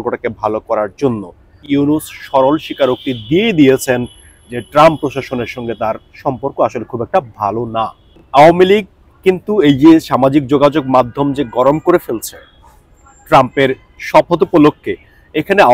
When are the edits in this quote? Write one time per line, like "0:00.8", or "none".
0:01.6
0:08.1